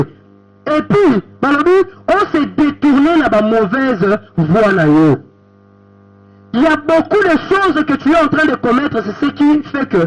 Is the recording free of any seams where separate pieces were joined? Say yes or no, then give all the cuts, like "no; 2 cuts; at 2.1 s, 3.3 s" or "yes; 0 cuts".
yes; 0 cuts